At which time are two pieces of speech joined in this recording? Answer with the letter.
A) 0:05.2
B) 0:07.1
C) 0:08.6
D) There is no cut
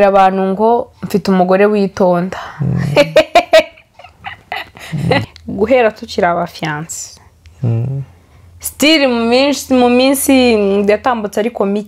A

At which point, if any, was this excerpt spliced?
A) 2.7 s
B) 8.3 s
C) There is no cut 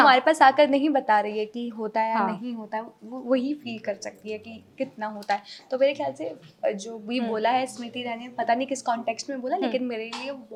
C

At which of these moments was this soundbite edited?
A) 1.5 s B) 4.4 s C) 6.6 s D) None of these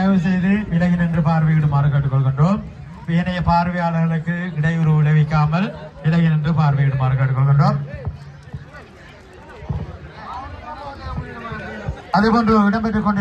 D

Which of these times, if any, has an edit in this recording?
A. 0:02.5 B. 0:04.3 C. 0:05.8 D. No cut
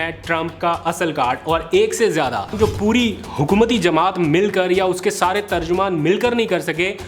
A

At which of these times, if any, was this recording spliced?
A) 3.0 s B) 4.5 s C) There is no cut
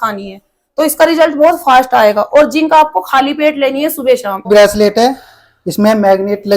B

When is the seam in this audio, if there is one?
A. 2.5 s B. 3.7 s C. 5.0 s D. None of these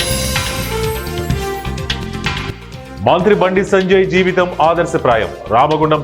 A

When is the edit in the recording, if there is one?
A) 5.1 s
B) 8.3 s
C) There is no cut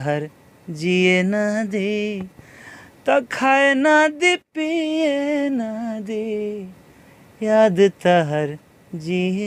C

